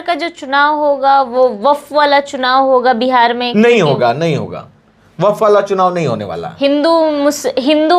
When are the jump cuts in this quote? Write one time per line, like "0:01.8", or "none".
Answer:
none